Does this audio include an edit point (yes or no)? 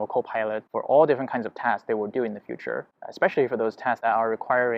no